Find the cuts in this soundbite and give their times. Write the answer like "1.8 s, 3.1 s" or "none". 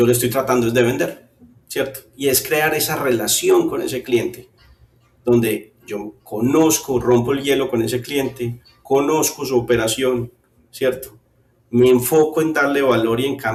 none